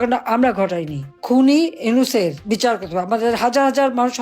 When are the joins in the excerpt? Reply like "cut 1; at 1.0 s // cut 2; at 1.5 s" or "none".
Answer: cut 1; at 1.1 s